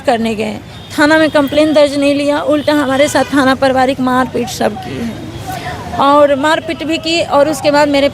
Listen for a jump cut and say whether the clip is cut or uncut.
uncut